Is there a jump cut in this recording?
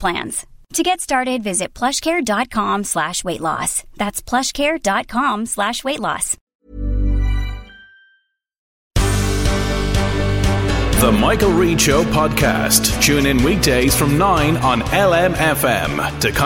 yes; 1 cut; at 8.6 s

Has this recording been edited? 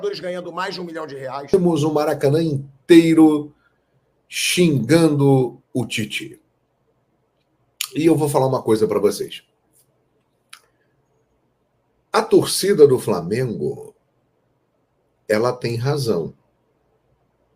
yes; 1 cut; at 1.4 s

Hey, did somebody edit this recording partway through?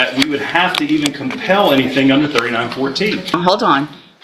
yes; 1 cut; at 3.3 s

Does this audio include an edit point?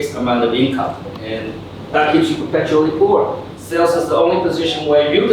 yes; 1 cut; at 1.1 s

